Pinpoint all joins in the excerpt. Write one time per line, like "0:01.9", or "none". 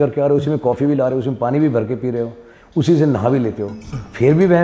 none